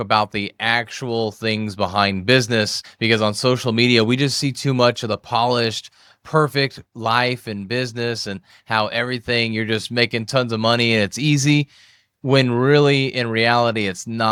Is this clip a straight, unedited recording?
yes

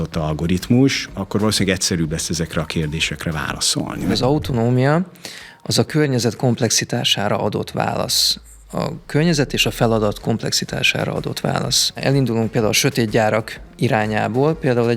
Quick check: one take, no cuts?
no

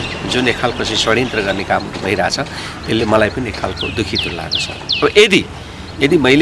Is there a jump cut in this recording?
no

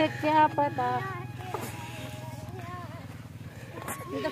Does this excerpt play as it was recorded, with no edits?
yes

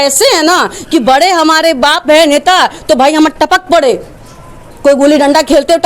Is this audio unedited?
yes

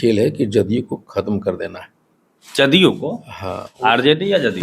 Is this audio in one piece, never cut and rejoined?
yes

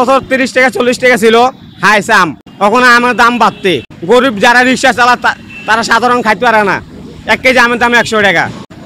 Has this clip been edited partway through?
no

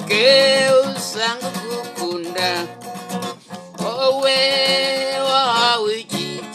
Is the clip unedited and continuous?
yes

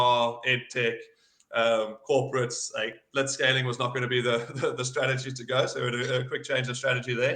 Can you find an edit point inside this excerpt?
no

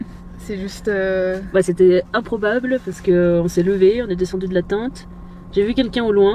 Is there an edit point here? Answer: no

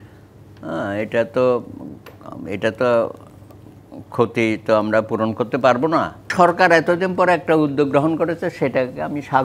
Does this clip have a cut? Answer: yes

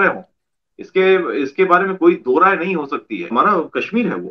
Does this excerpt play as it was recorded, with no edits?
no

